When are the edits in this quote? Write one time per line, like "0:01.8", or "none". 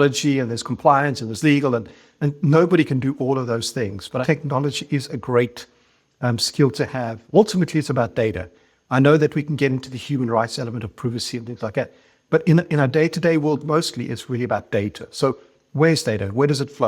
0:04.2
0:07.2